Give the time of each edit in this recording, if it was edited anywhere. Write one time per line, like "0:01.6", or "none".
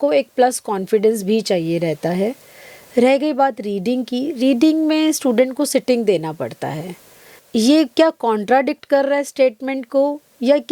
0:07.4